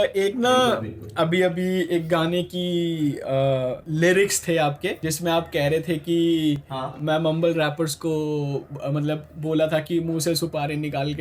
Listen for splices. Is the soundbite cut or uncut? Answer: cut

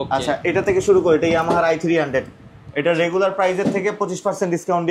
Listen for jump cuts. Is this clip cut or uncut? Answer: uncut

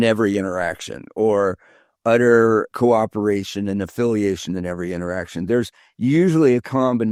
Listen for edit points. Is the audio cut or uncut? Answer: uncut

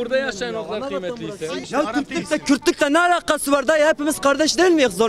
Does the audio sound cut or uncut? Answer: cut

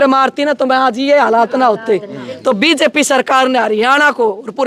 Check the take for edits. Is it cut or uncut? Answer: uncut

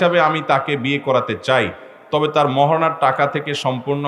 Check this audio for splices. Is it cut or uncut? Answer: uncut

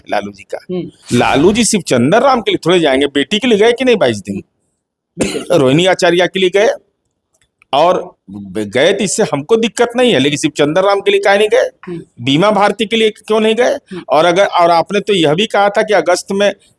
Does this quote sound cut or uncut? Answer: cut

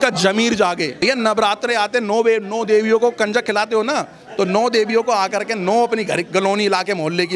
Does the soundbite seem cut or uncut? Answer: cut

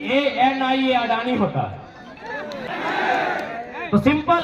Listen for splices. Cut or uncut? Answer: cut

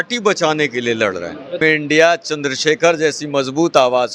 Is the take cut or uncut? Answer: cut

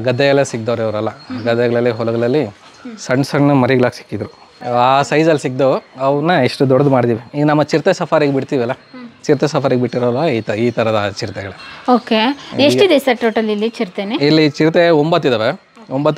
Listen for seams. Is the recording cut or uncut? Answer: uncut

